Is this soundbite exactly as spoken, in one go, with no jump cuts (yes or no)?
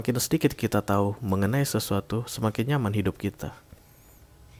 yes